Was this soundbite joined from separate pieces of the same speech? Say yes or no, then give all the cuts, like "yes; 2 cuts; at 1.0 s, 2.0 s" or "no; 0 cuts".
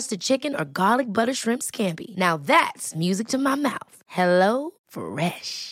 no; 0 cuts